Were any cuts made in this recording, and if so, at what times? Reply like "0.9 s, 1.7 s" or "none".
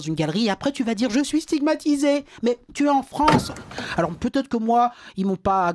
3.7 s